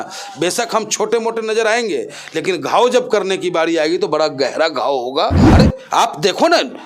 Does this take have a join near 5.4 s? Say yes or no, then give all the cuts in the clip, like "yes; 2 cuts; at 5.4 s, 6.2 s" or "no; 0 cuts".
yes; 1 cut; at 5.4 s